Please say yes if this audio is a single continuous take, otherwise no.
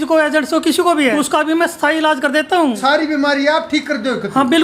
no